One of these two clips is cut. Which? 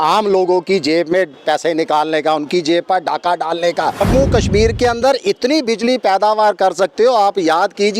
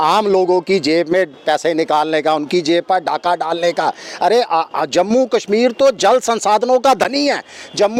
first; 1 cut; at 4.0 s

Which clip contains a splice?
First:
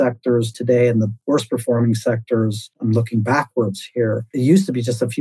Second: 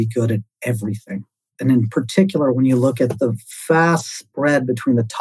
first; 3 cuts; at 1.2 s, 2.7 s, 4.3 s

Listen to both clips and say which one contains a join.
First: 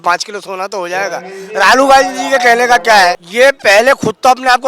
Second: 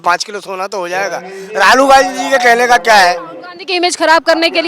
first; 1 cut; at 3.2 s

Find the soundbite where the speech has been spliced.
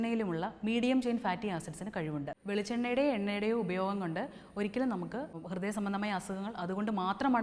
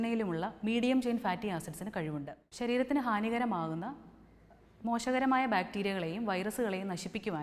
first; 2 cuts; at 2.4 s, 5.4 s

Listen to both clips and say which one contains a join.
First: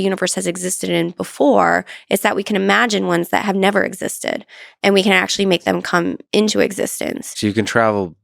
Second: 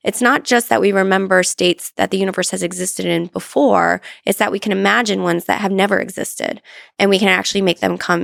first; 1 cut; at 7.3 s

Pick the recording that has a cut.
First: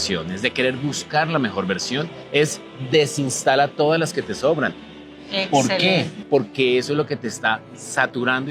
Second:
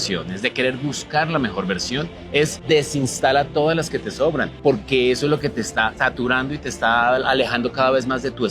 second; 3 cuts; at 2.6 s, 4.5 s, 5.9 s

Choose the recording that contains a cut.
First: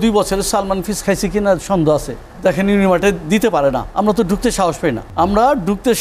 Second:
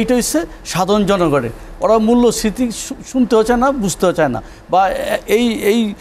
first; 3 cuts; at 2.2 s, 3.9 s, 5.0 s

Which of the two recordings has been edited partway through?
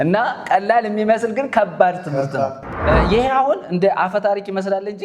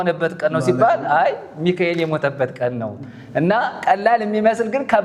first; 1 cut; at 2.7 s

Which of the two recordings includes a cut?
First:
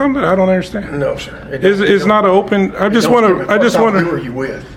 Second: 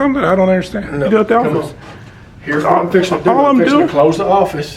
second; 1 cut; at 1.1 s

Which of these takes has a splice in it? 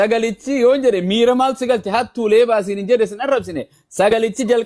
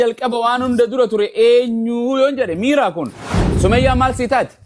second; 1 cut; at 3.5 s

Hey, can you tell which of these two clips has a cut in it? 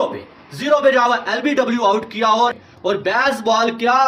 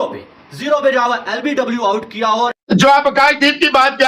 second; 1 cut; at 2.6 s

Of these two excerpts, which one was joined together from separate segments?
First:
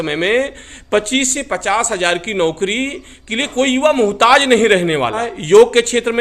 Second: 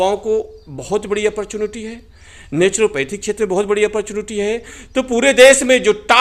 first; 1 cut; at 5.3 s

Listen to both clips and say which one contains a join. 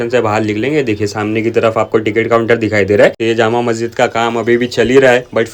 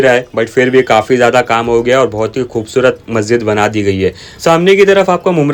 first; 1 cut; at 3.2 s

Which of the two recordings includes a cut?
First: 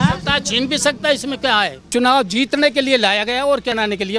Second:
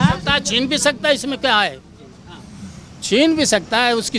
first; 1 cut; at 1.9 s

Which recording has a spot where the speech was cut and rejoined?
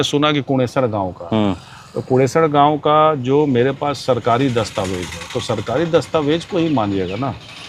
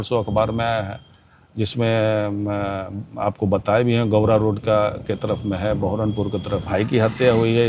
second; 1 cut; at 6.6 s

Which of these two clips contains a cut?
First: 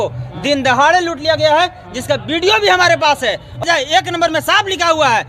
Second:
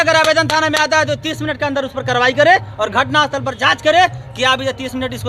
first; 1 cut; at 3.6 s

